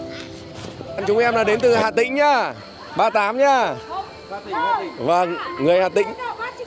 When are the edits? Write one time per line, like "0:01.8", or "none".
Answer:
0:01.0